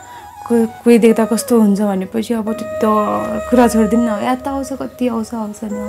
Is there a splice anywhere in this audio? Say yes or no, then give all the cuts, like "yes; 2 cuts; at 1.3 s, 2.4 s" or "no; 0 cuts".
no; 0 cuts